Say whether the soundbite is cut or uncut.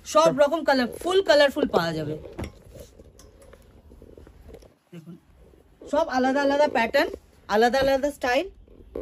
uncut